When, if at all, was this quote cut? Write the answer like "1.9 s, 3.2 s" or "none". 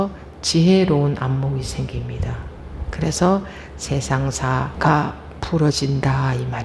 4.7 s